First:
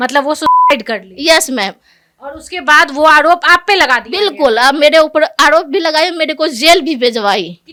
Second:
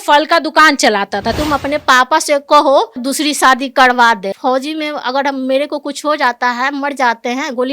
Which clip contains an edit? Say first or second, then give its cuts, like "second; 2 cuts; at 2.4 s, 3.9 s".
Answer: second; 3 cuts; at 1.3 s, 3.1 s, 4.3 s